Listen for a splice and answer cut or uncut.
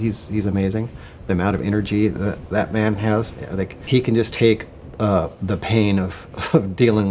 cut